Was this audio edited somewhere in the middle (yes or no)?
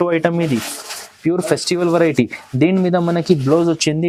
no